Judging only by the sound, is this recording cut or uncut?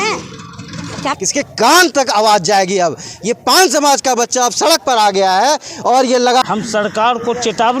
cut